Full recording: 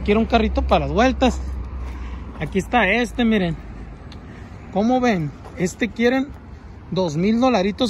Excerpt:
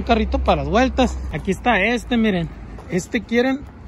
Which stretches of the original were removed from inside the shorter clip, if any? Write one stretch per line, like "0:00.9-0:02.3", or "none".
0:01.5-0:02.3
0:03.8-0:05.4